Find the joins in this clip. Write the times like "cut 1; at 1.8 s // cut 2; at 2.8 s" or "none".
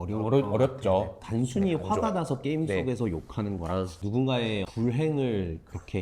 cut 1; at 1.2 s